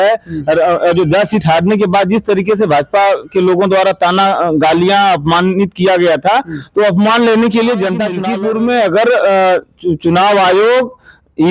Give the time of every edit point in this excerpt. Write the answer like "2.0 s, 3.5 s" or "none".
8.2 s